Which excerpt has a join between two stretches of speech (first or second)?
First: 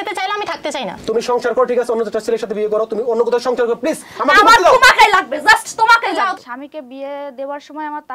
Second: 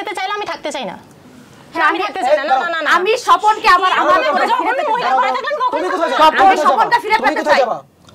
first